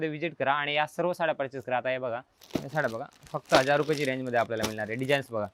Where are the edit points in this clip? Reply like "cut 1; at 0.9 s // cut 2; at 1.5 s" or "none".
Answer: cut 1; at 2.3 s